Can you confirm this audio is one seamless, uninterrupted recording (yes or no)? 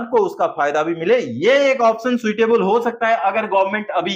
yes